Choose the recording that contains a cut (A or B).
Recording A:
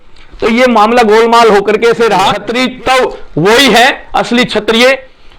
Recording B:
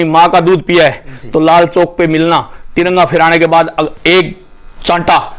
A